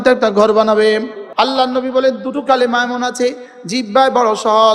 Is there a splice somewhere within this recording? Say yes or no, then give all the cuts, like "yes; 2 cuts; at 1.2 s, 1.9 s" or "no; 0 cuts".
no; 0 cuts